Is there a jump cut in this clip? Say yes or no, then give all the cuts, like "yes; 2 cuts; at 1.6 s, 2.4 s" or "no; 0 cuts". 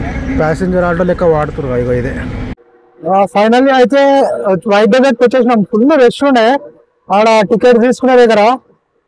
yes; 1 cut; at 2.5 s